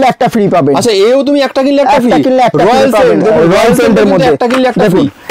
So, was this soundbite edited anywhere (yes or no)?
no